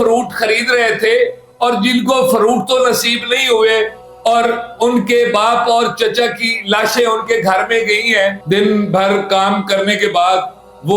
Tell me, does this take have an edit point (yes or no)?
yes